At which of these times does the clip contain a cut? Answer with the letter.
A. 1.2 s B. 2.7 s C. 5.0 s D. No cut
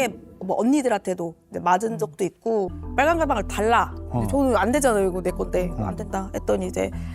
B